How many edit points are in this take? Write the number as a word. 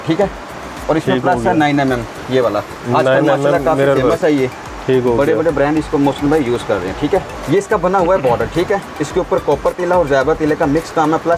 one